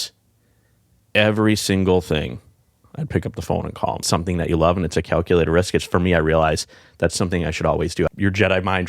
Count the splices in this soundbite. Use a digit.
2